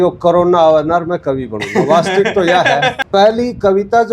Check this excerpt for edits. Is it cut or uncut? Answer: cut